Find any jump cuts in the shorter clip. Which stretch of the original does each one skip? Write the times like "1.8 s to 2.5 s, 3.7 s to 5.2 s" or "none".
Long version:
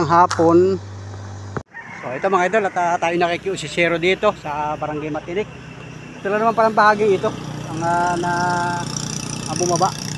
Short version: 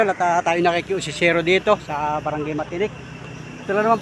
none